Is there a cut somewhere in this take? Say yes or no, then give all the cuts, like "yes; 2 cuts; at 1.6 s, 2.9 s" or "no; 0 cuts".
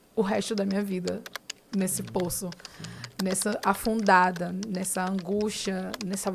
no; 0 cuts